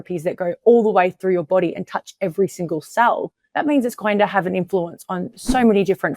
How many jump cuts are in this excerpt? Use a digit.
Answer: 1